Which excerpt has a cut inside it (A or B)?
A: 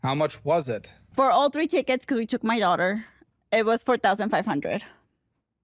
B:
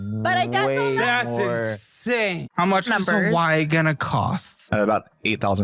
B